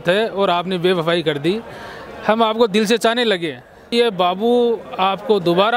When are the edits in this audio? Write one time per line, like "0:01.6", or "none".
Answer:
0:03.9